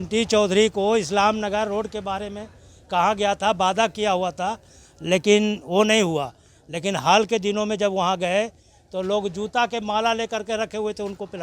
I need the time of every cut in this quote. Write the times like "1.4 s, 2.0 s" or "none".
none